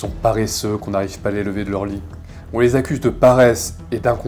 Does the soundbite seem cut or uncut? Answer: uncut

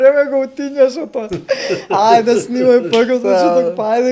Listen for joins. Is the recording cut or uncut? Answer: uncut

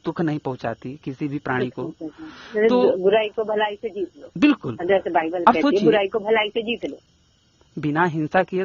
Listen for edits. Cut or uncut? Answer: cut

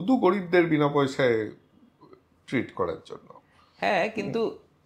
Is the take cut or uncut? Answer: uncut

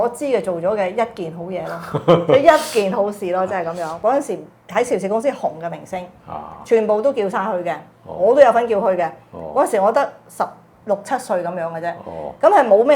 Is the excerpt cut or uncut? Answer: cut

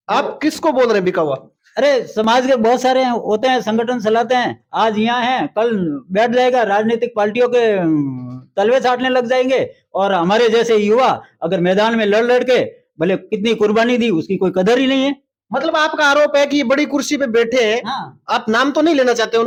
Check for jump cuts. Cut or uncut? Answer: uncut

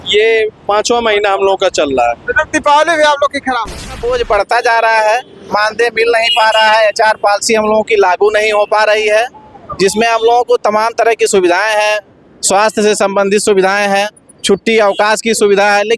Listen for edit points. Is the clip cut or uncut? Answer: cut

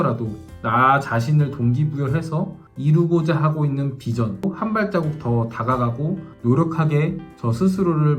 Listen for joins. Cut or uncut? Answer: cut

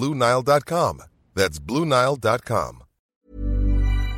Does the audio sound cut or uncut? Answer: cut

